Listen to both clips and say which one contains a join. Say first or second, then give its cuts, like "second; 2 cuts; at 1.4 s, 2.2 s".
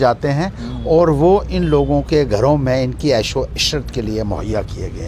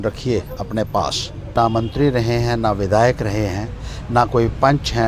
second; 1 cut; at 1.5 s